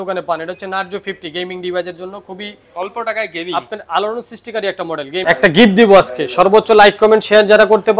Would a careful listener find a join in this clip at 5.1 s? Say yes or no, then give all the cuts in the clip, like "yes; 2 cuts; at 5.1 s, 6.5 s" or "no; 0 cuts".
yes; 1 cut; at 5.1 s